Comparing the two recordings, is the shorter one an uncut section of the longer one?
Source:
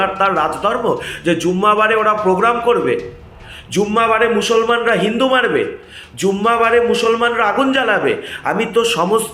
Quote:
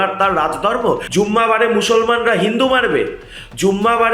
no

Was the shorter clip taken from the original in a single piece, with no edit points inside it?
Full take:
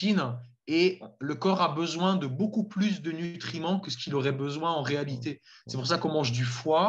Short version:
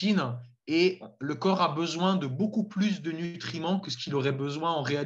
yes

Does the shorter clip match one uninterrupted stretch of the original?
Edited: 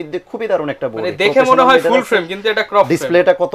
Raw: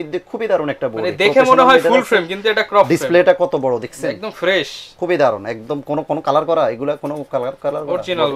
yes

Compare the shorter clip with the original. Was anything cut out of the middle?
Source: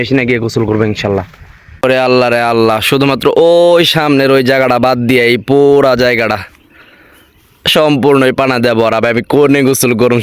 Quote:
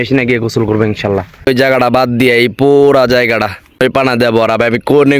yes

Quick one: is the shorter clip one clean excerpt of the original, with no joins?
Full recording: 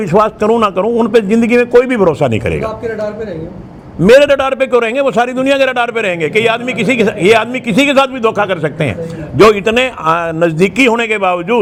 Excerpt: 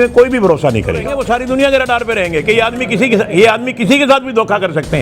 no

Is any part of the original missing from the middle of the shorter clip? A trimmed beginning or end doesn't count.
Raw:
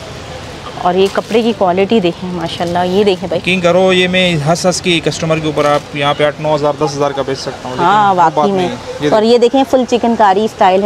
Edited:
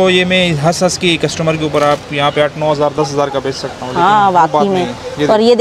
no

